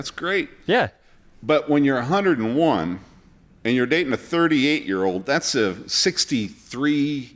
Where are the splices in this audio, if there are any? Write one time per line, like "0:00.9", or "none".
none